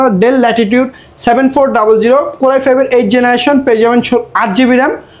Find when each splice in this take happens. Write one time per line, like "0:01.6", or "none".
none